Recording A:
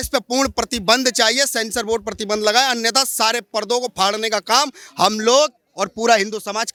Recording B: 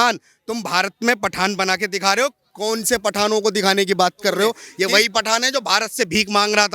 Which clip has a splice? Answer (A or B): B